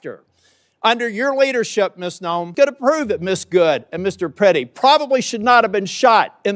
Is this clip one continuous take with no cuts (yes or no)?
no